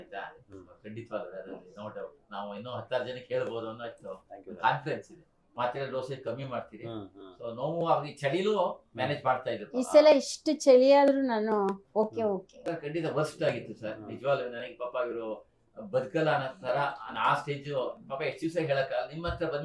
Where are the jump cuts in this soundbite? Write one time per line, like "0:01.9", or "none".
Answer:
0:05.4
0:12.5